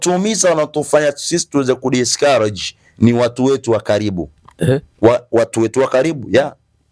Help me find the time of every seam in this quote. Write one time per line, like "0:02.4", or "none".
none